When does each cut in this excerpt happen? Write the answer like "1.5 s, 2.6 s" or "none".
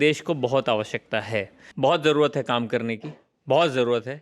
1.6 s